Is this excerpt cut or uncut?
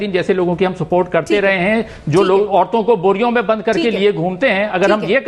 uncut